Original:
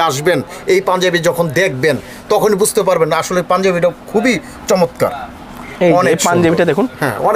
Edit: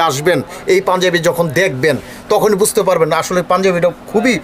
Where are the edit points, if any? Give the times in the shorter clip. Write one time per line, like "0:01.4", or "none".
none

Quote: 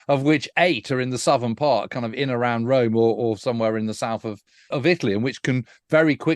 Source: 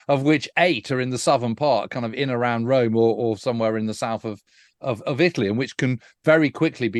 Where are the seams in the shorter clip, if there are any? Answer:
0:04.7

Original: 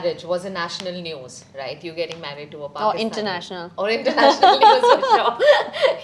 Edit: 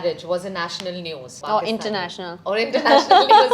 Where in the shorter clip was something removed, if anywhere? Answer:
0:01.3

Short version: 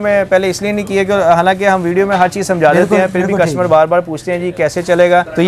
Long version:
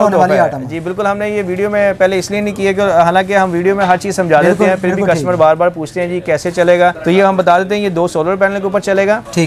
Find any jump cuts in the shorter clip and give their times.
none

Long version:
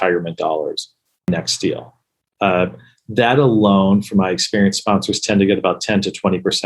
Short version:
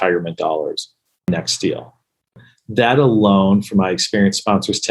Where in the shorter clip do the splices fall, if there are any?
0:02.3

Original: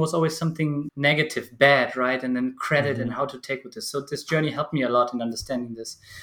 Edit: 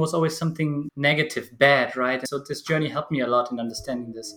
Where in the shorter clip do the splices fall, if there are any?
0:02.2

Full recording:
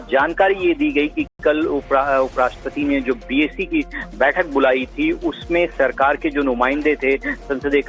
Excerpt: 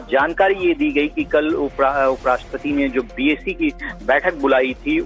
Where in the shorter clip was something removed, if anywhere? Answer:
0:01.2

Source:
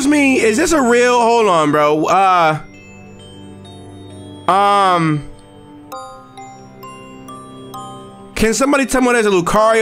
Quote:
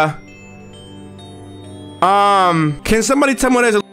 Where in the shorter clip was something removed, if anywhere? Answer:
0:02.8

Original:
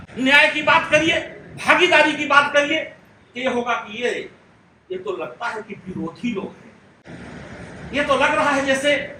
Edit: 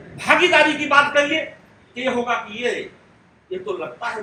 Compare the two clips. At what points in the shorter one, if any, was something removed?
none

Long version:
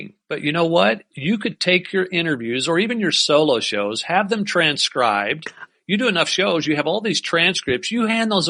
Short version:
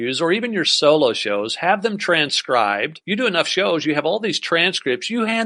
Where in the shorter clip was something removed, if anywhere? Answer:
0:03.0

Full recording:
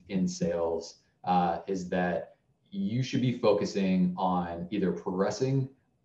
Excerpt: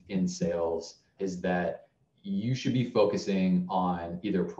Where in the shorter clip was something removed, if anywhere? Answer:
0:01.1

